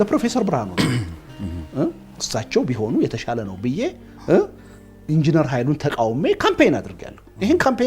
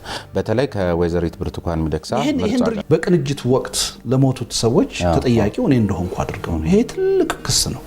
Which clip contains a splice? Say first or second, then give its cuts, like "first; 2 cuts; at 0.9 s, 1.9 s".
second; 1 cut; at 2.8 s